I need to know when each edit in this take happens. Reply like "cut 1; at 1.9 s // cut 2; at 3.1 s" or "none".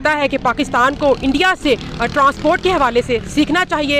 none